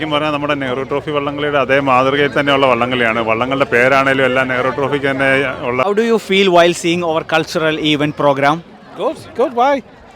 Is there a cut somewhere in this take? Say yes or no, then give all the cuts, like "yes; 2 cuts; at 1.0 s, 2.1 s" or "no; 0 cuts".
yes; 1 cut; at 5.8 s